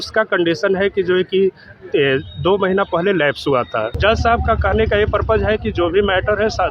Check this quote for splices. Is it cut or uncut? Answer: cut